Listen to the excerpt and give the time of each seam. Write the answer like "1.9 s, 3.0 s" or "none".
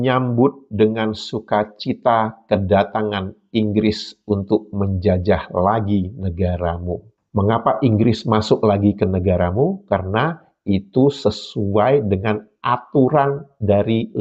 none